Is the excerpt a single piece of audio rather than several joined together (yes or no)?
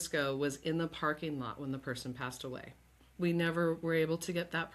no